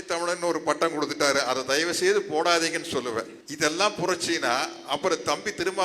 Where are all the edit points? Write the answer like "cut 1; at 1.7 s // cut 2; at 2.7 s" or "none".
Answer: cut 1; at 3.4 s